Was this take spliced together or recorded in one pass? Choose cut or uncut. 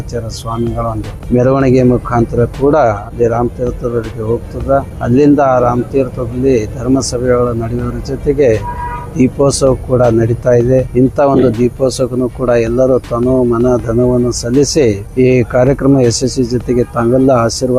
cut